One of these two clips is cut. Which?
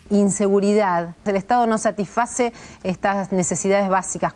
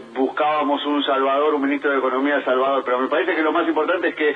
second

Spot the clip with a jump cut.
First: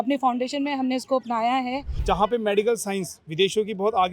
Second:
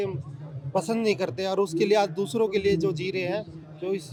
first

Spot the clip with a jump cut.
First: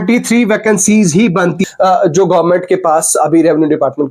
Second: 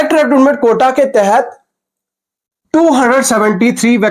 first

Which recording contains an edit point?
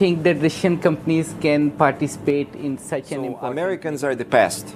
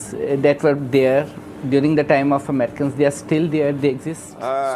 first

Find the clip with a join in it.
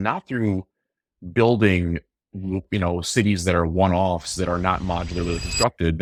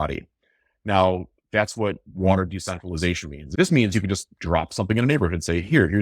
second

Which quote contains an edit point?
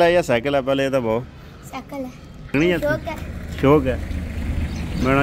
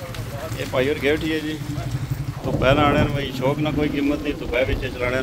first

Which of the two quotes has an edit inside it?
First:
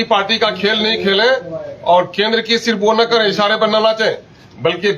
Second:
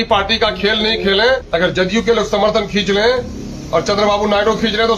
second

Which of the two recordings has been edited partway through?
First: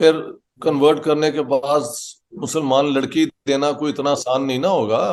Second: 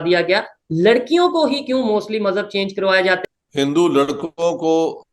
second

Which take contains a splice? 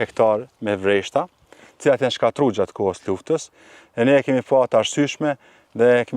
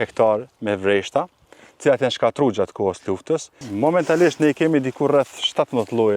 second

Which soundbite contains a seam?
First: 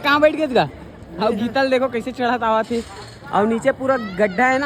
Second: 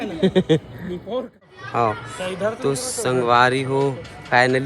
second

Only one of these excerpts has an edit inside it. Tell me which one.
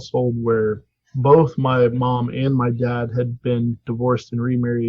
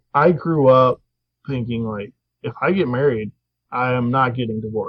first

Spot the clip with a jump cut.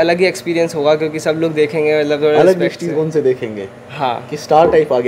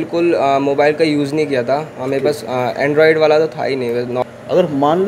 second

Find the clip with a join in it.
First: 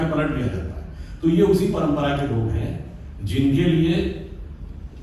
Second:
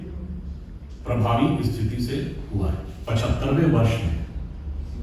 second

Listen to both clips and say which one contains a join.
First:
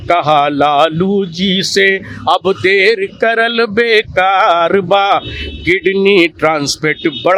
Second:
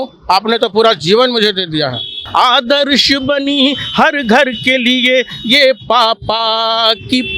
second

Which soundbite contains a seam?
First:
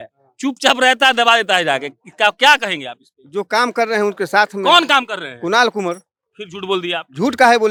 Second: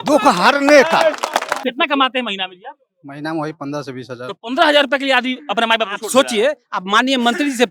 second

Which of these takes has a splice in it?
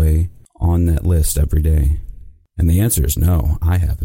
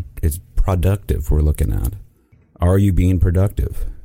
second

